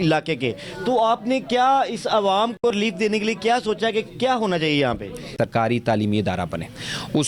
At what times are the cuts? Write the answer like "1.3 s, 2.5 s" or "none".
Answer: 5.4 s